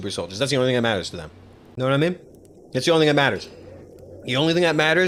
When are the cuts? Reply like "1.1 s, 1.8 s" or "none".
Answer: none